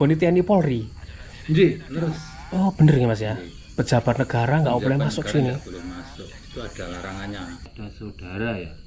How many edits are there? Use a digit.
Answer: 1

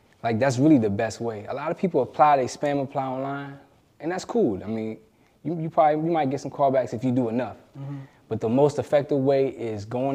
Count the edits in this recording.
0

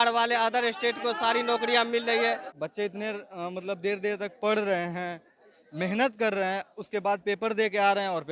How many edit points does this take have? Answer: 1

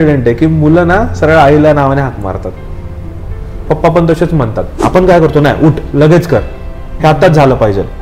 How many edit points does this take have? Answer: 1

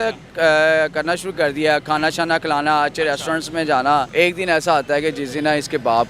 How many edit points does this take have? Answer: 1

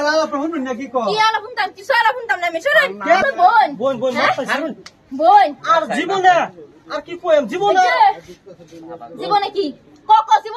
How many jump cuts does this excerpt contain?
1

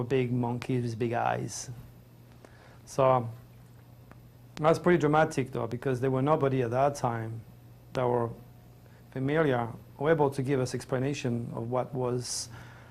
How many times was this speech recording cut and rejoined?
1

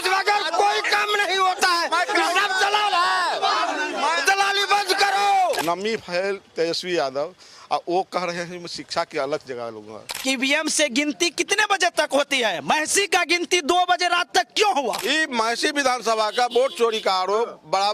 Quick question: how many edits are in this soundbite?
3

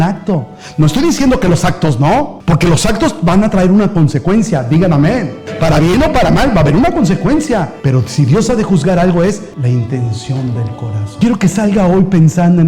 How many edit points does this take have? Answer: 1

